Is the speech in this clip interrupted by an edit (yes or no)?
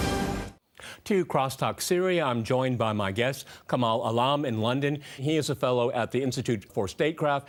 no